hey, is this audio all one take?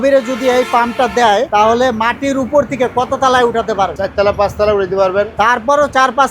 no; 2 cuts; at 1.5 s, 4.0 s

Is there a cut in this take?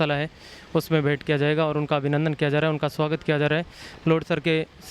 no; 0 cuts

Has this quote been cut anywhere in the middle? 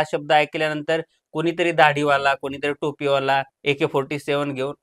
no; 0 cuts

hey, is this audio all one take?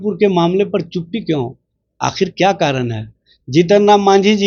yes; 0 cuts

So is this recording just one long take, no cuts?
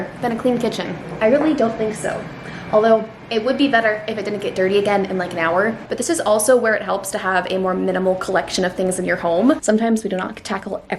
no; 2 cuts; at 5.8 s, 9.6 s

